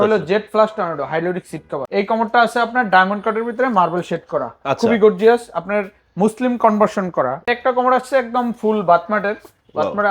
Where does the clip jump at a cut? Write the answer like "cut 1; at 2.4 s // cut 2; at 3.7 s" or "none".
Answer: cut 1; at 1.7 s // cut 2; at 7.5 s